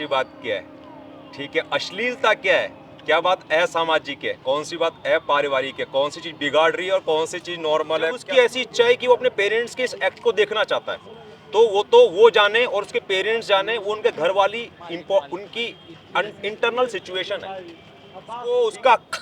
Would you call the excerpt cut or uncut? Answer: cut